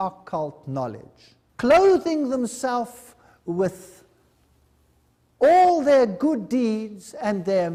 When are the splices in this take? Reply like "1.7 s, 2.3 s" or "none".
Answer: none